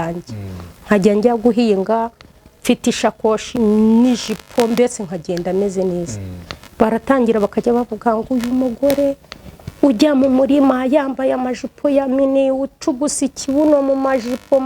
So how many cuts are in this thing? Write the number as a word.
one